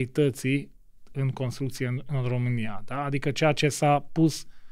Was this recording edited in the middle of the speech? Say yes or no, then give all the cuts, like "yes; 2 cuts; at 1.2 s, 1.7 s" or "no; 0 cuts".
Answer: no; 0 cuts